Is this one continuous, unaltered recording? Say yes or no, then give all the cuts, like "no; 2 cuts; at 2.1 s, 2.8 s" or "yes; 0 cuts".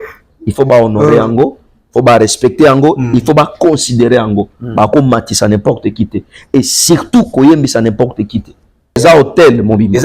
no; 1 cut; at 9.0 s